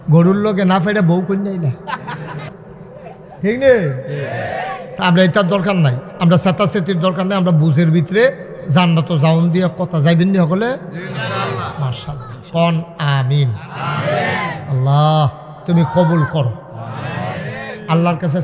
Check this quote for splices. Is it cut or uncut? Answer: cut